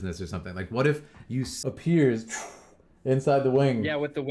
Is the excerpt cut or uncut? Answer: cut